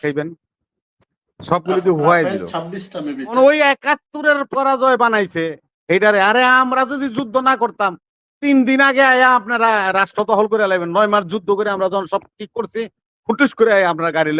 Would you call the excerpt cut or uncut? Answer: cut